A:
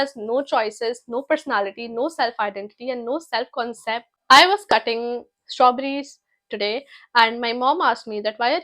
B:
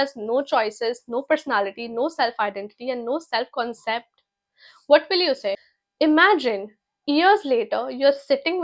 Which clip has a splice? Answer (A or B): A